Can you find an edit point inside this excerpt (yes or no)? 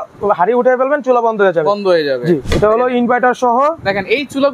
yes